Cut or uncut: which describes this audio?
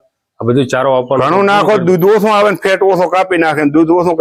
uncut